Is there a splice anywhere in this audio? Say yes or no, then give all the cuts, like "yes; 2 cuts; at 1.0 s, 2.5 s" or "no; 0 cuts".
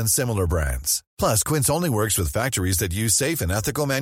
no; 0 cuts